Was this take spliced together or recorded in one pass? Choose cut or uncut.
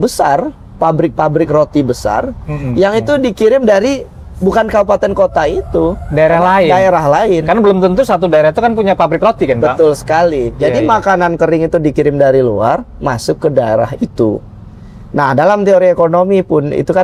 uncut